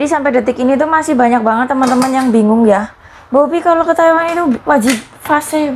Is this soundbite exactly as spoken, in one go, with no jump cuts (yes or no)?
yes